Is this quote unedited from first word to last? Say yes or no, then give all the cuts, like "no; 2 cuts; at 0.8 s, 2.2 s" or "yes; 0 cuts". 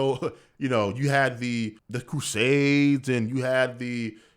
no; 1 cut; at 1.9 s